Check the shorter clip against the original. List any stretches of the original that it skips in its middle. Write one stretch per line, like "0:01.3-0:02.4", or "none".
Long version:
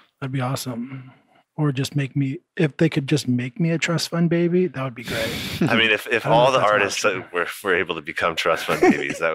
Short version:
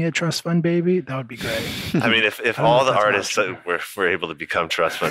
none